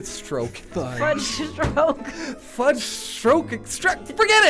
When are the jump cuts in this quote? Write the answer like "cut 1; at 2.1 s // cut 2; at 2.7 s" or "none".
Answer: none

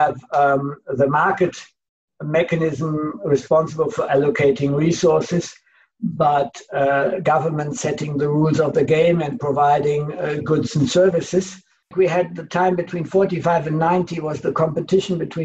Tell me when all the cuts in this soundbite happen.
cut 1; at 11.9 s

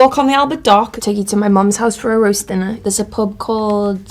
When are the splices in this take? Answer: cut 1; at 0.9 s // cut 2; at 2.8 s

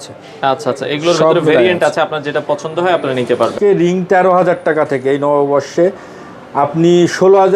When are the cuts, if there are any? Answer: cut 1; at 3.5 s

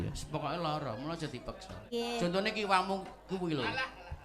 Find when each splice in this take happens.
cut 1; at 1.8 s

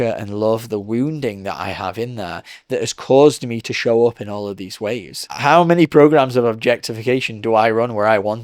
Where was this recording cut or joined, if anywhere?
cut 1; at 5.3 s

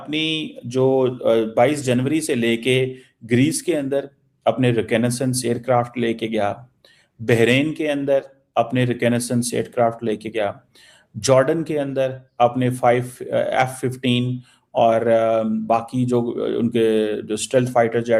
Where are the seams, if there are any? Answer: none

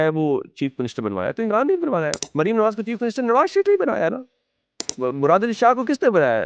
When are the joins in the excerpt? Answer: none

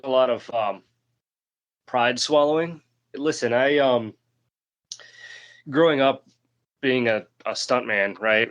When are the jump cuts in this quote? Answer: cut 1; at 3.1 s

